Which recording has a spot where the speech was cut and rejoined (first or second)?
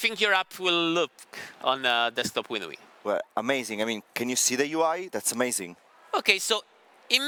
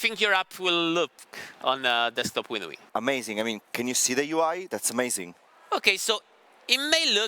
second